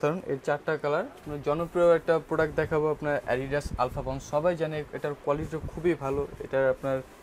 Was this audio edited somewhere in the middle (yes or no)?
yes